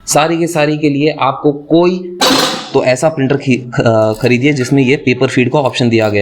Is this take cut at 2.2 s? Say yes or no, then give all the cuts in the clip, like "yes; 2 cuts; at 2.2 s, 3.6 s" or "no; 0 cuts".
yes; 1 cut; at 2.2 s